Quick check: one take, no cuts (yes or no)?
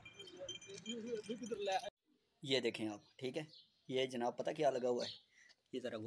no